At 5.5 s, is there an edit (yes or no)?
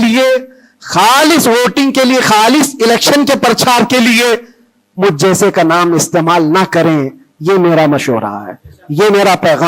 no